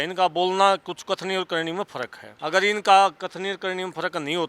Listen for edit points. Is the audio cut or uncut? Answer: cut